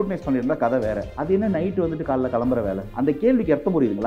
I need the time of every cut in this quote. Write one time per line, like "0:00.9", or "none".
none